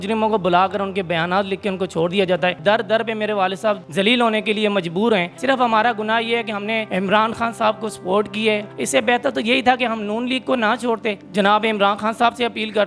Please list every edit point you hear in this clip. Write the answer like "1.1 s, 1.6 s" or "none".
2.6 s, 3.8 s, 5.3 s, 6.8 s, 8.7 s, 11.2 s